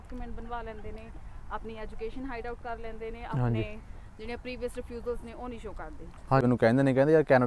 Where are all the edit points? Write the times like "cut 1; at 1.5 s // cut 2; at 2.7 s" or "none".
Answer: cut 1; at 6.5 s